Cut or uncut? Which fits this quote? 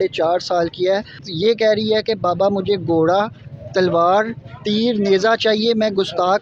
cut